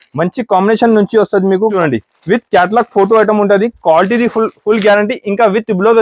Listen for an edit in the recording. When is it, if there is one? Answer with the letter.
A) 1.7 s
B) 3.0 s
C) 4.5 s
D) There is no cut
A